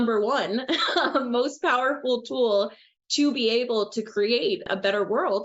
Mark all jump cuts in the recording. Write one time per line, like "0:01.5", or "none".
none